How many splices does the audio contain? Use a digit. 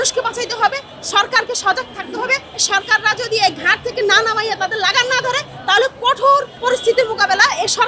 2